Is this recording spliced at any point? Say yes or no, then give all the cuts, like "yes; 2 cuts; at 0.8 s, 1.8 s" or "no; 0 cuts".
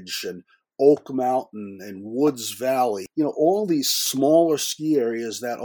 yes; 2 cuts; at 3.0 s, 4.1 s